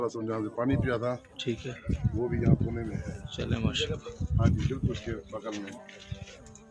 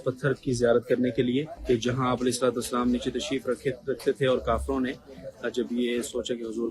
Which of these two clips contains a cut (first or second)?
second